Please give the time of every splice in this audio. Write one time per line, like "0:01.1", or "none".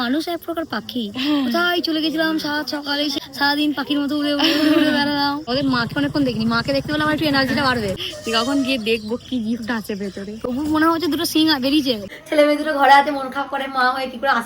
0:03.2
0:05.5
0:08.0
0:12.1